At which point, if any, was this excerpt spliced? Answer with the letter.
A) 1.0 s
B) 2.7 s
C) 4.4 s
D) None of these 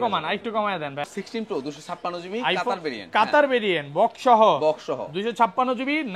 A